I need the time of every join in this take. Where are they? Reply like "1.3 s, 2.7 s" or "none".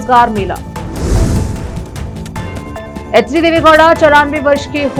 none